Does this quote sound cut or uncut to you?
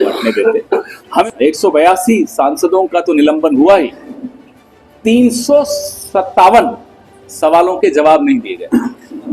cut